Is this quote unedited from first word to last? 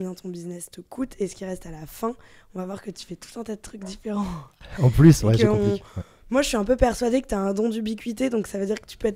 yes; 0 cuts

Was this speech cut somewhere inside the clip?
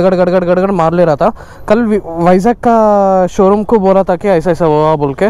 no; 0 cuts

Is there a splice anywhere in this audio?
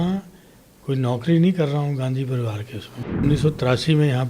yes; 1 cut; at 3.2 s

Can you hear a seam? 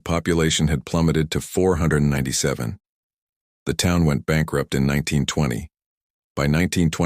yes; 1 cut; at 1.0 s

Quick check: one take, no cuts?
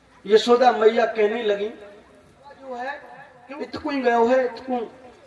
no; 1 cut; at 2.6 s

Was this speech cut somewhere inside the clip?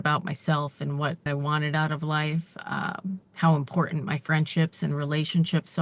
yes; 1 cut; at 1.3 s

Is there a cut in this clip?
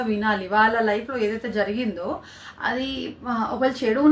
no; 0 cuts

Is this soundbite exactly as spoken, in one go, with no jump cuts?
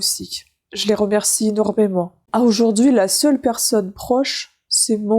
no; 1 cut; at 2.2 s

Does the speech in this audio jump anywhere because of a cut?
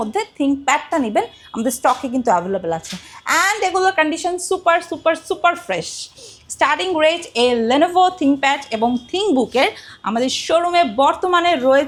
no; 0 cuts

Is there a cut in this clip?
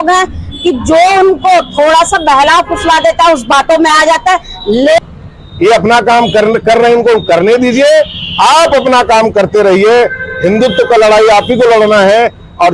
yes; 1 cut; at 5.0 s

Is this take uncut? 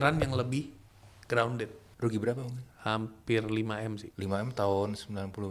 no; 2 cuts; at 1.8 s, 4.1 s

